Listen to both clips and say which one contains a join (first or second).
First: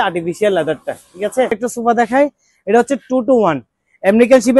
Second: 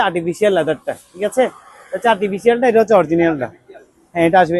first